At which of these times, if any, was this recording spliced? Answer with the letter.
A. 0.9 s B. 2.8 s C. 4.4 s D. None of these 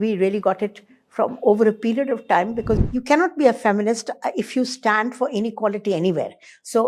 B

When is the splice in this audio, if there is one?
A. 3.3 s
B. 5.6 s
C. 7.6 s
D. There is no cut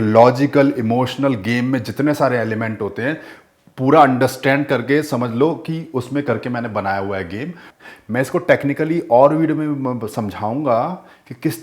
C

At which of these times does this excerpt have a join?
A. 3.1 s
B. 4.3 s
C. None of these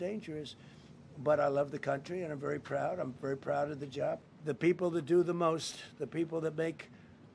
B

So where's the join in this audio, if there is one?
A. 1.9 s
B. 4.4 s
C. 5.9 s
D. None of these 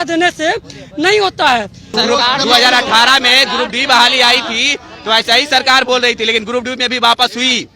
A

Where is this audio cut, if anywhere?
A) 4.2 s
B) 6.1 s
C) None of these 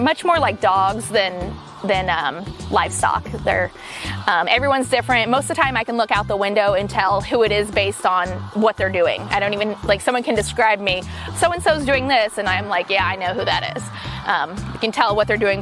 C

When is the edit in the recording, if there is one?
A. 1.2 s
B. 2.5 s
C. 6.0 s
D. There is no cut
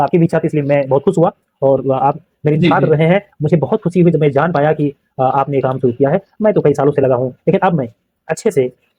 D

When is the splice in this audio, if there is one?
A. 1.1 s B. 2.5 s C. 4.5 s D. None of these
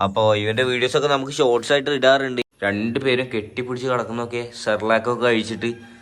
B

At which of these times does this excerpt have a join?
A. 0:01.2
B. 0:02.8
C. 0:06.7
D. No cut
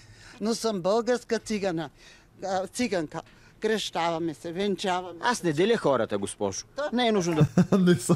D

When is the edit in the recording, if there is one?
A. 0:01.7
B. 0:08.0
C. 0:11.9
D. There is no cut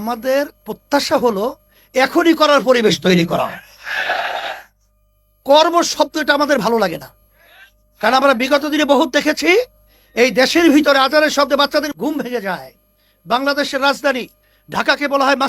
C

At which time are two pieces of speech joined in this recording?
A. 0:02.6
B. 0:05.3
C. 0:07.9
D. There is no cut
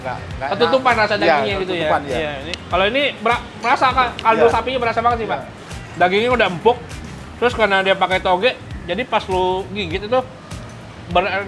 B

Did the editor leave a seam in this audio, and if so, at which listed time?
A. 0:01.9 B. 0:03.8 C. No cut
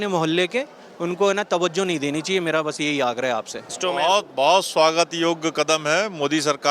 B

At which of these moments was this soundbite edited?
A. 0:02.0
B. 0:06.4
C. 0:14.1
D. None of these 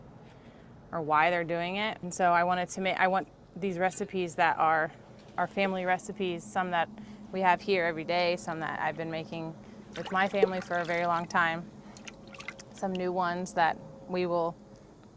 A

